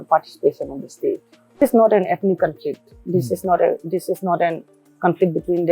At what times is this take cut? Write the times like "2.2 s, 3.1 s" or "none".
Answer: 1.6 s